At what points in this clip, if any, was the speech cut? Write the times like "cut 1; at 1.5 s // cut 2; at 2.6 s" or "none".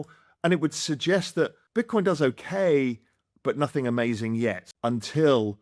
cut 1; at 1.6 s // cut 2; at 4.7 s